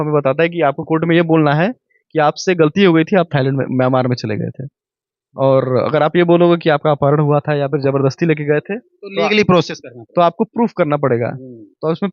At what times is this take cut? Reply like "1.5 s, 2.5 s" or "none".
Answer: none